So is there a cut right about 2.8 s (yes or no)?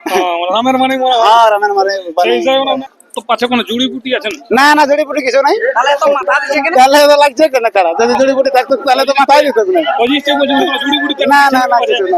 yes